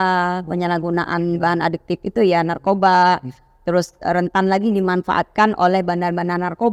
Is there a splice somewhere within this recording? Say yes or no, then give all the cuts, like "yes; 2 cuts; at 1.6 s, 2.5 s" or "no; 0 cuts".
no; 0 cuts